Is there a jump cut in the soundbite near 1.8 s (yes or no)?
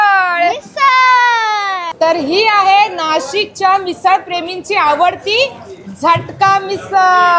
yes